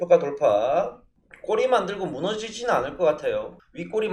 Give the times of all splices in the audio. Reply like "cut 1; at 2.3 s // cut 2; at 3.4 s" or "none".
none